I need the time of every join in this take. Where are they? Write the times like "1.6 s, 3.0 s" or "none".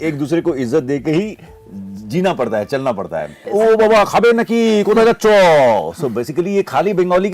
3.4 s

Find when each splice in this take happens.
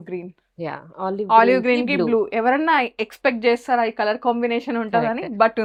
none

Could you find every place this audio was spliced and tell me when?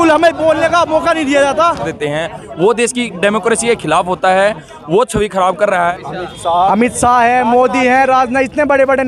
1.9 s, 5.9 s

